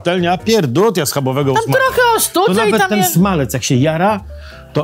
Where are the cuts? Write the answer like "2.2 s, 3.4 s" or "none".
none